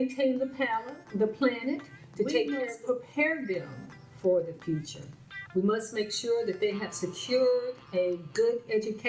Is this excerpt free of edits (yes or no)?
no